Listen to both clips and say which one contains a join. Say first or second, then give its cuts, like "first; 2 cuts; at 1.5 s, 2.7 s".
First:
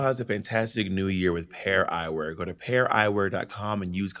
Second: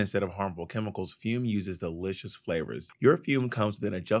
second; 1 cut; at 2.8 s